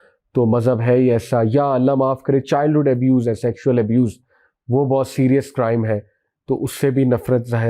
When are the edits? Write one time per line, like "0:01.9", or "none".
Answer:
none